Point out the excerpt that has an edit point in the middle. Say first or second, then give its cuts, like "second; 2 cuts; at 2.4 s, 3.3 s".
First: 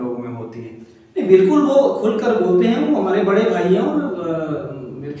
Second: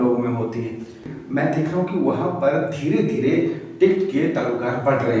second; 1 cut; at 1.0 s